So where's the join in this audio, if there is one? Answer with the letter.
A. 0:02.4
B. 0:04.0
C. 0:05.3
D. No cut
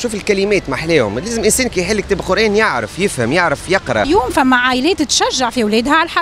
B